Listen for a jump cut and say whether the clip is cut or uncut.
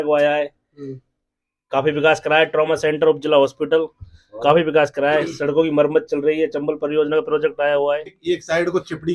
cut